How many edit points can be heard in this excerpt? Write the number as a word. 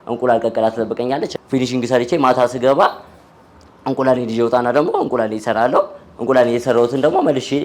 one